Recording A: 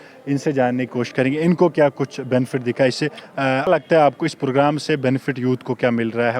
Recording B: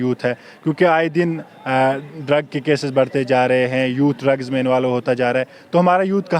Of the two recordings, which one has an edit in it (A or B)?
A